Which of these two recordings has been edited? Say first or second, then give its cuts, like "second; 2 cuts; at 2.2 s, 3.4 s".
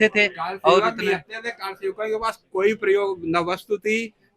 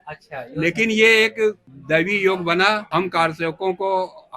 second; 2 cuts; at 1.7 s, 2.8 s